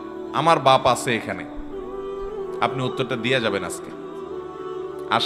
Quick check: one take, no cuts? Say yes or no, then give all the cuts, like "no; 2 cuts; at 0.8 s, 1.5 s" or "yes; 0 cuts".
yes; 0 cuts